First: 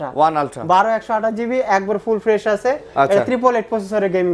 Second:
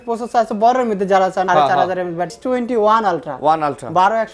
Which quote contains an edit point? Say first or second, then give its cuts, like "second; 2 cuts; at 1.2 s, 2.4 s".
second; 2 cuts; at 1.5 s, 2.4 s